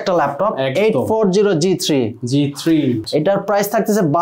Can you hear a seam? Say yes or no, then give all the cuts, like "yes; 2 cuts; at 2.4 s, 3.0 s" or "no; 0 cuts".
yes; 1 cut; at 3.0 s